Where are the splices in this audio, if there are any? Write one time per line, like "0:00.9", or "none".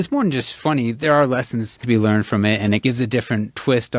0:01.8
0:02.8